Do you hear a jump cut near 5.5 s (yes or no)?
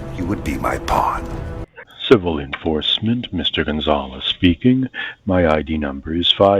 no